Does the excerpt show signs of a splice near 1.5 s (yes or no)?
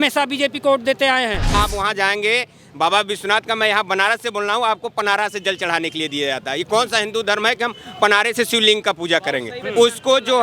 yes